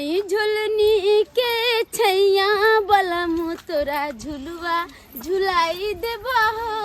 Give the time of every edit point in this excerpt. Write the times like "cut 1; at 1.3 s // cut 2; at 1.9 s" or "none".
none

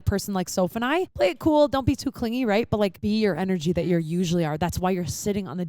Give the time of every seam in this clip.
cut 1; at 1.1 s // cut 2; at 3.0 s

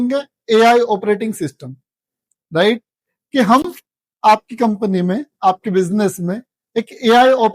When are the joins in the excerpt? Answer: none

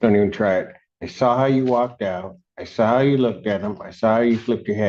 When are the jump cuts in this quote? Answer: none

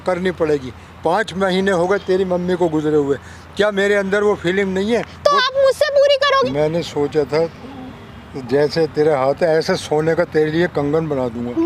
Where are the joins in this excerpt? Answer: cut 1; at 6.5 s

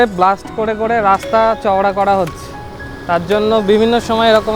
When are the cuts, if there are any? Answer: none

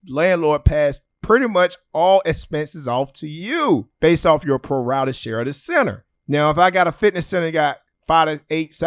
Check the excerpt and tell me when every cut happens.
cut 1; at 3.9 s // cut 2; at 6.1 s

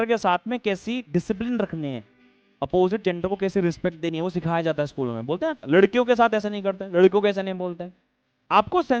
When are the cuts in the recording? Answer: cut 1; at 5.6 s

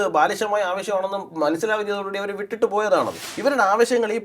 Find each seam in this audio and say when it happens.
cut 1; at 3.2 s

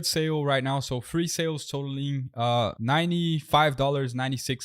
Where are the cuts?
cut 1; at 2.8 s

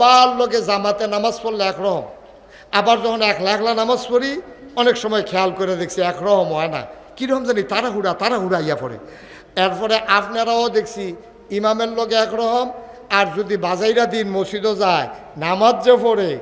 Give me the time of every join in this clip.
none

